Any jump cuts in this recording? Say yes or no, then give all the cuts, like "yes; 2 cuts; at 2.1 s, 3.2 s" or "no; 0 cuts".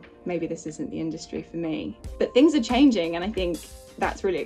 no; 0 cuts